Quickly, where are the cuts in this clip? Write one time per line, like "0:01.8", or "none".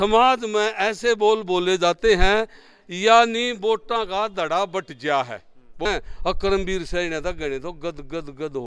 0:05.8